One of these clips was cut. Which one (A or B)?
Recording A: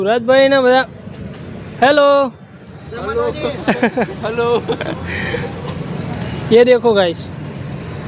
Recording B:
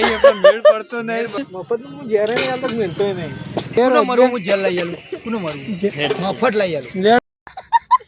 B